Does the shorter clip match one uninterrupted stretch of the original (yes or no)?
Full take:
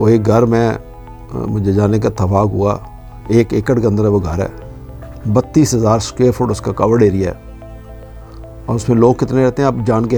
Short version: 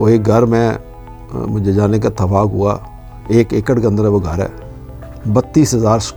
yes